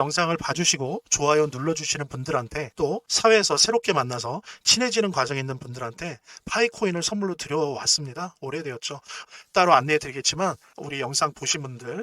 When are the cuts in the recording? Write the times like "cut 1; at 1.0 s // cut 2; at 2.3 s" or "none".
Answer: cut 1; at 2.6 s // cut 2; at 10.7 s

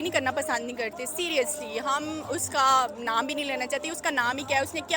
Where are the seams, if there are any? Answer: none

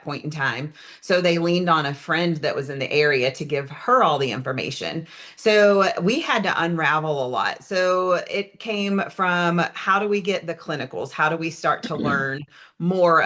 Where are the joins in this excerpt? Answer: none

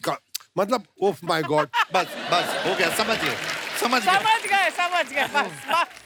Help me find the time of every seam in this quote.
none

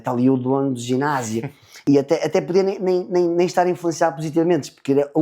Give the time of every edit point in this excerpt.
cut 1; at 1.8 s

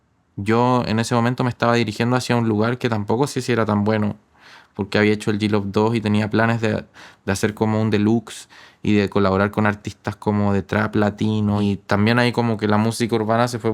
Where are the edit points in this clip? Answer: cut 1; at 11.6 s

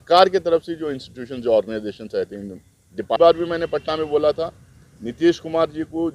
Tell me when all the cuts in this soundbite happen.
cut 1; at 3.2 s

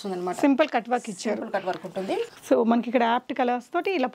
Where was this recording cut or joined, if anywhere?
cut 1; at 2.3 s

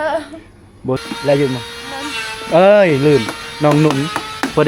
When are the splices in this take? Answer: cut 1; at 1.0 s

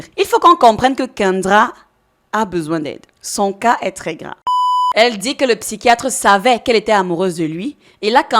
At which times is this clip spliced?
cut 1; at 4.5 s

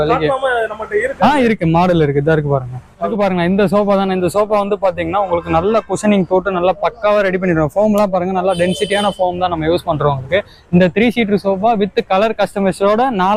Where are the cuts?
none

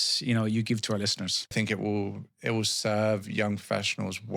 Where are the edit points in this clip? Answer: cut 1; at 1.5 s

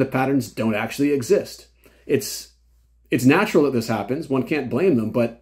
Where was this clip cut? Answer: none

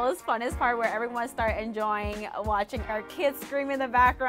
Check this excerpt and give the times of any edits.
none

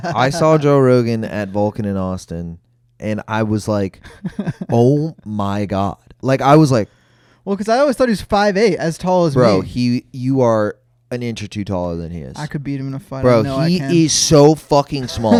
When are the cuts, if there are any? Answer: none

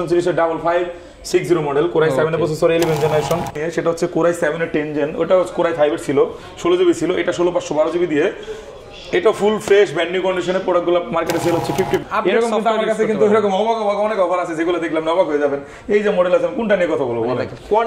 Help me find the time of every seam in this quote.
cut 1; at 3.6 s // cut 2; at 12.0 s

